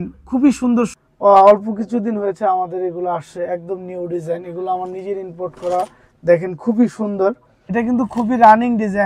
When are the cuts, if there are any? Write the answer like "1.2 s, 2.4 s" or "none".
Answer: 0.9 s, 7.5 s